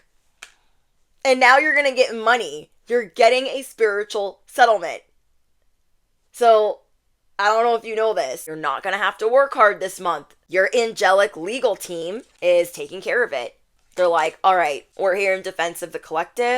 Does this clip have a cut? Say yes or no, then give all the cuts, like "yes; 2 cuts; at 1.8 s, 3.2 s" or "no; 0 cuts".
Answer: yes; 4 cuts; at 8.5 s, 10.3 s, 12.3 s, 14.9 s